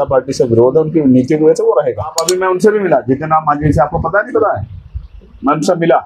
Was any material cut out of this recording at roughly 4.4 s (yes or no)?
no